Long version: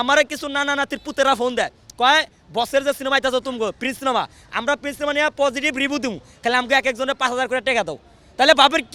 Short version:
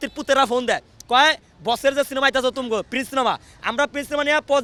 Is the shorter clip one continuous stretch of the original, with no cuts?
yes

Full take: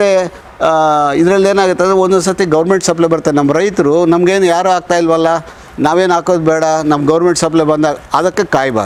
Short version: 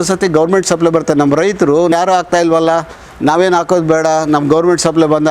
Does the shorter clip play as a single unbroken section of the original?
no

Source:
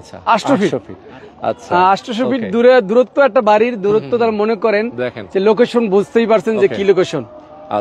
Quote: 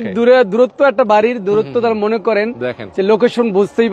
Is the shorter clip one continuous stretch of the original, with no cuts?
yes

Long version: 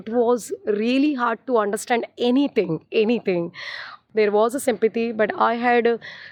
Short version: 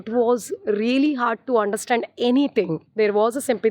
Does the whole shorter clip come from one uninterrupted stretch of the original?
no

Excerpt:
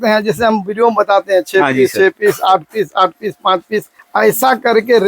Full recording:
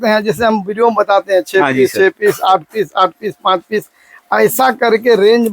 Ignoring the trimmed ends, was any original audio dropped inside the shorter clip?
yes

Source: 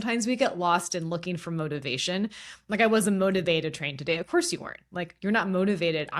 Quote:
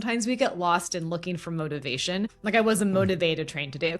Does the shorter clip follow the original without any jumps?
no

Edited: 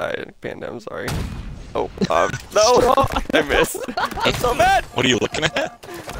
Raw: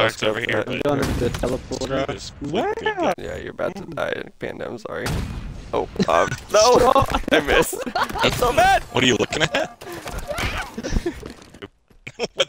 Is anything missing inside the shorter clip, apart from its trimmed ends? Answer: no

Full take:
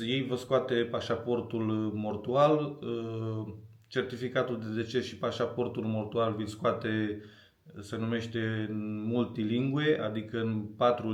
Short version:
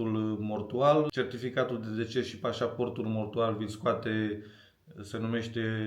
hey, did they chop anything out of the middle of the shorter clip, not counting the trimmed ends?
yes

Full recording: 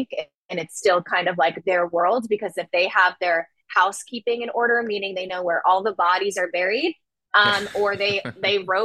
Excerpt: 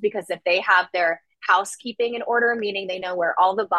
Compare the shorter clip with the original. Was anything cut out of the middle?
no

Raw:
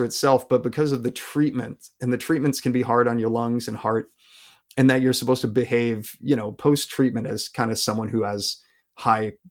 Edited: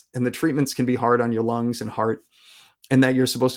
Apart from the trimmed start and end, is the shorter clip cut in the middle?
no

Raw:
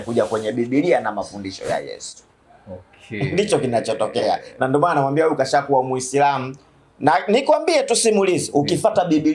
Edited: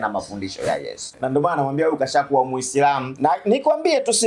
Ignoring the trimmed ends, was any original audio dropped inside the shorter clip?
yes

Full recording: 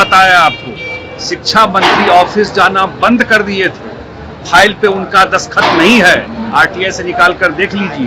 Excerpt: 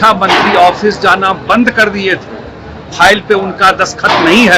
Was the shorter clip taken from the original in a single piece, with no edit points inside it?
yes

